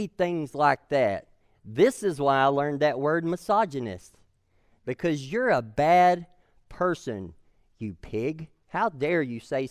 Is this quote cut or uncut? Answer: uncut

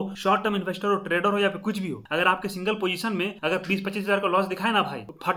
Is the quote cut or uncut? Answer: uncut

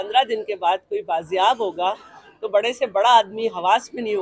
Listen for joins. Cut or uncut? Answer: uncut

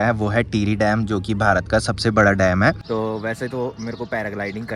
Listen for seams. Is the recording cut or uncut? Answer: cut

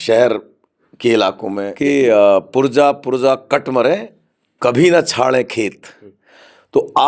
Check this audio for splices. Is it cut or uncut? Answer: cut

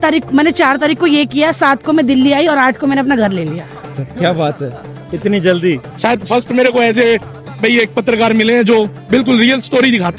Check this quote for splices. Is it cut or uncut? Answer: cut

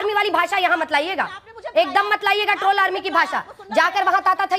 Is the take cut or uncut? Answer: uncut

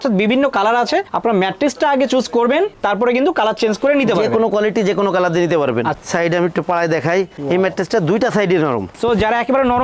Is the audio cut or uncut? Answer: cut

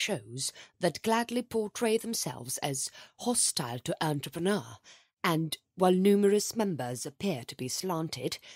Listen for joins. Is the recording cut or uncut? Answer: uncut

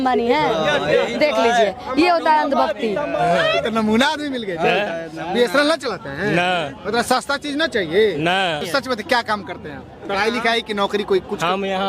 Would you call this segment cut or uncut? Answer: cut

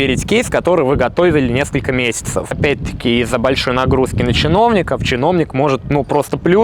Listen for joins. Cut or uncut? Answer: cut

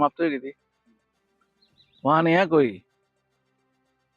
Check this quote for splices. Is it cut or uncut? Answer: uncut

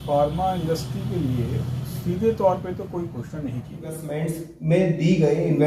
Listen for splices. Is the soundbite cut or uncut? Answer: cut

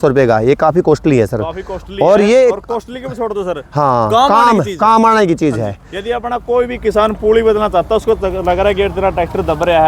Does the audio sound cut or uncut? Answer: uncut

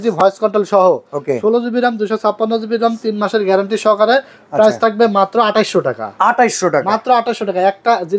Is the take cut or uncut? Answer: uncut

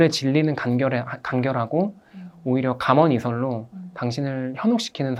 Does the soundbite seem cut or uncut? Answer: uncut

